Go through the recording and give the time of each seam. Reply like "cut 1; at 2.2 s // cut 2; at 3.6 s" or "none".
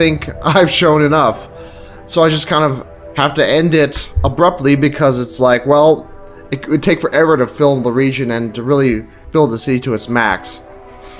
cut 1; at 7.9 s

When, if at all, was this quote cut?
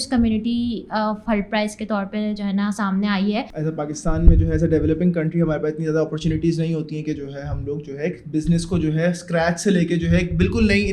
cut 1; at 3.5 s

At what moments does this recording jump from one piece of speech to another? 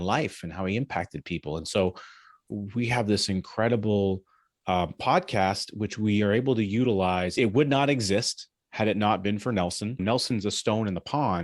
cut 1; at 2.5 s // cut 2; at 7.4 s // cut 3; at 10.0 s

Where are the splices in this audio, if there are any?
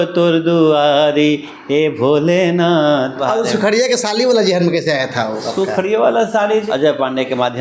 cut 1; at 3.2 s // cut 2; at 6.7 s

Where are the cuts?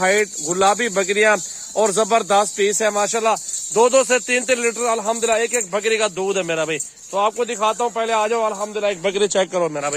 none

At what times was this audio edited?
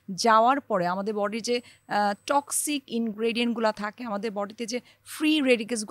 none

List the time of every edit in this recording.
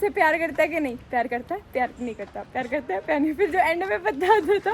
none

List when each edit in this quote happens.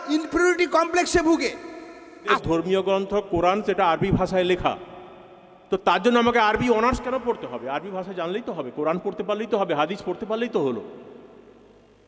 cut 1; at 2.4 s

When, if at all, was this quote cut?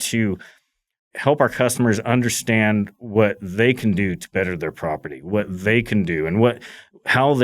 cut 1; at 1.1 s

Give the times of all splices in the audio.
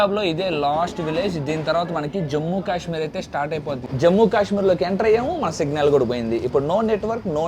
cut 1; at 3.8 s

